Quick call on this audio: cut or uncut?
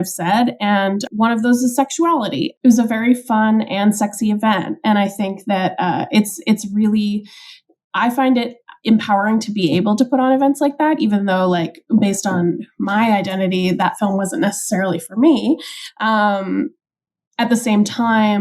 cut